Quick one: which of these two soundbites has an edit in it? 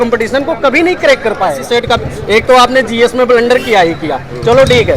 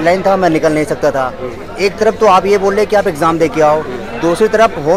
first; 1 cut; at 1.6 s

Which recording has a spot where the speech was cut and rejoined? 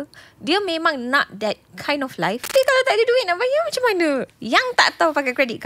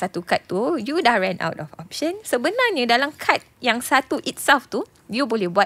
first; 2 cuts; at 2.5 s, 4.3 s

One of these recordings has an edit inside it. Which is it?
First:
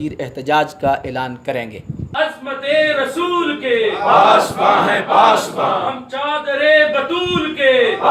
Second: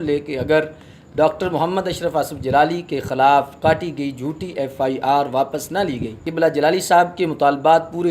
second; 1 cut; at 6.3 s

